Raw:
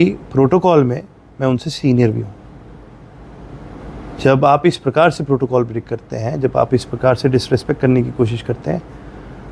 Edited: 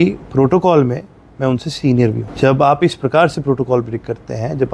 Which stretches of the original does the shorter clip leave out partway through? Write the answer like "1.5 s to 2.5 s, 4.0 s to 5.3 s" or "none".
2.3 s to 4.1 s